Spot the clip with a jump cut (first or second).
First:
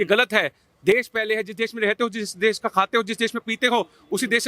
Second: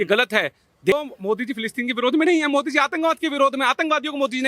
second